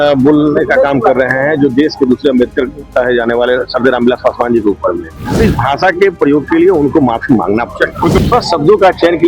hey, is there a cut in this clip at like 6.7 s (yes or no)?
no